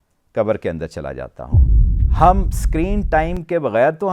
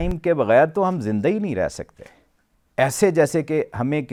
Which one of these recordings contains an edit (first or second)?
first